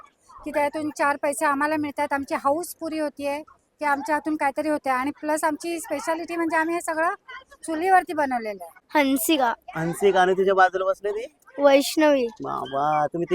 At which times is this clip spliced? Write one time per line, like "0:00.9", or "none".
0:08.7